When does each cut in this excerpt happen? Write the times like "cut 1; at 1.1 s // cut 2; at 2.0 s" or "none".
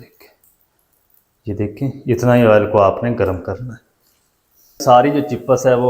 cut 1; at 4.8 s